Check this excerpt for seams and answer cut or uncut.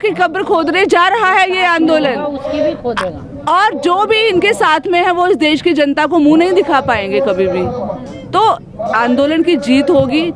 uncut